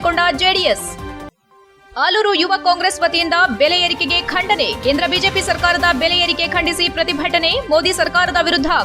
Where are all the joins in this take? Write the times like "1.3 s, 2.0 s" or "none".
none